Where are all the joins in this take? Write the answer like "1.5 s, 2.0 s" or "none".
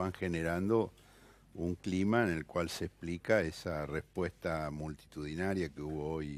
none